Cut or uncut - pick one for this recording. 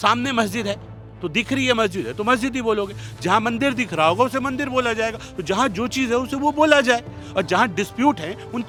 uncut